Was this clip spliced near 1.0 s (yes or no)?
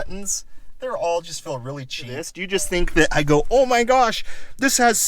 no